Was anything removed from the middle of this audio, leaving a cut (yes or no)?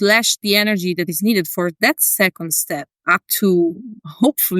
yes